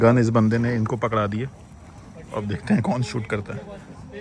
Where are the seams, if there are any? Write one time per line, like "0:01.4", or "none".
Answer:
none